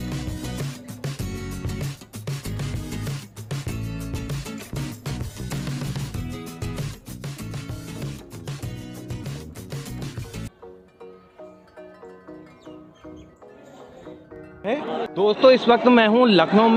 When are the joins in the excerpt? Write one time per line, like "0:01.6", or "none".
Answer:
none